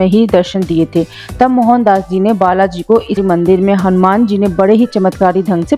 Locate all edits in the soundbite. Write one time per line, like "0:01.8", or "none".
0:03.2